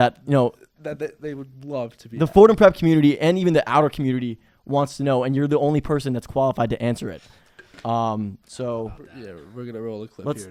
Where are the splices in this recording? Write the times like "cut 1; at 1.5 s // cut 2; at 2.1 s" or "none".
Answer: none